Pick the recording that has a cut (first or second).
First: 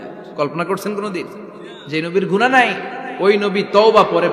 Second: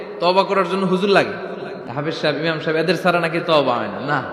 second